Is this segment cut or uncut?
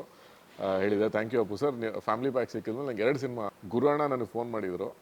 cut